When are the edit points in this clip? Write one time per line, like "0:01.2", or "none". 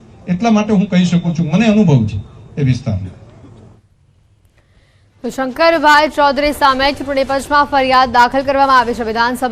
0:05.0